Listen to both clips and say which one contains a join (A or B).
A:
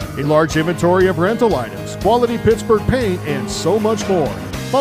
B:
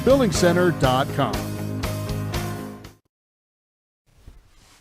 B